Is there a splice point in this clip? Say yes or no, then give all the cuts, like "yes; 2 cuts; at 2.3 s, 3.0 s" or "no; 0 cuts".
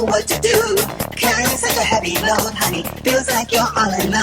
no; 0 cuts